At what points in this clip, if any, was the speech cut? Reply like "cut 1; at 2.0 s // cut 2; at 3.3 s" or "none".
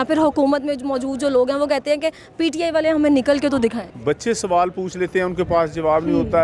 cut 1; at 3.9 s